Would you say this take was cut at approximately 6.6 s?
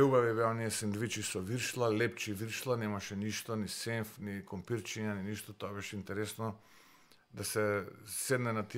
no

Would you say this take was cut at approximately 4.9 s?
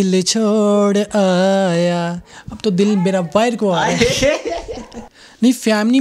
yes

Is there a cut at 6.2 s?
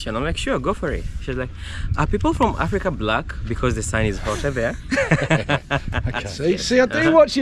yes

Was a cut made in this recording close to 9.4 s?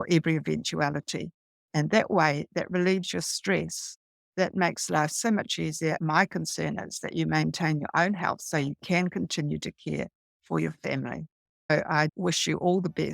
no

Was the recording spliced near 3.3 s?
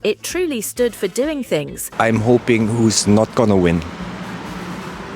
no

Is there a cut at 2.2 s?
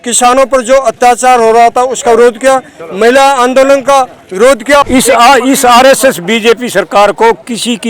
no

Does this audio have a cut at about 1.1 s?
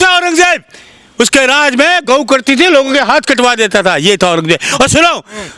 no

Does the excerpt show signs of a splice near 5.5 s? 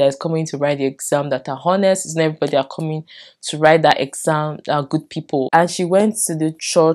yes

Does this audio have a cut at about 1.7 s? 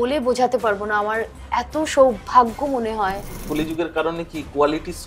no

